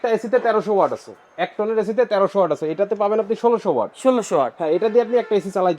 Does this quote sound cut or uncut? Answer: uncut